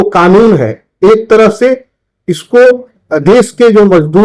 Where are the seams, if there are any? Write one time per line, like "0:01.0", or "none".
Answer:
0:02.9